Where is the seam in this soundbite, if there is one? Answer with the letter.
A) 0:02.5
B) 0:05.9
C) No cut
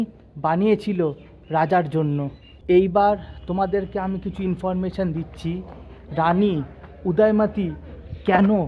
A